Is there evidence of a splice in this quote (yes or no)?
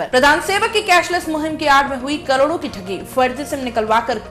no